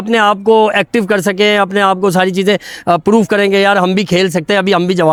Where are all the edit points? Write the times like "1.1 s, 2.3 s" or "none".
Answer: none